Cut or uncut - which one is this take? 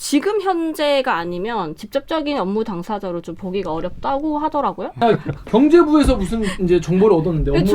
cut